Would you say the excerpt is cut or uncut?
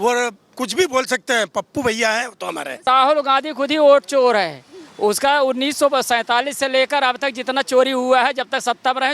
cut